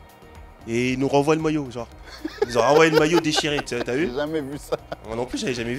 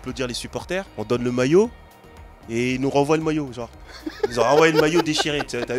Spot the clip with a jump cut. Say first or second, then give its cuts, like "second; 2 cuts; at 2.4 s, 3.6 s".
second; 1 cut; at 0.9 s